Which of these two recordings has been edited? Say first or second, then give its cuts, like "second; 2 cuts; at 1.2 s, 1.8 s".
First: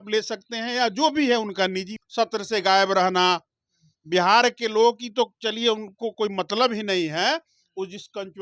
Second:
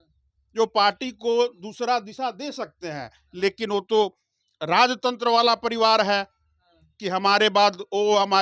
first; 1 cut; at 1.9 s